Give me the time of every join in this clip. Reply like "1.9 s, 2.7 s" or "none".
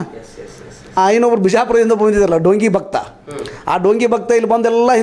1.0 s